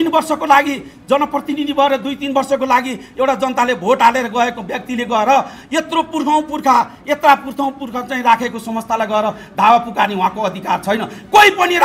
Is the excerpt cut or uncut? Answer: uncut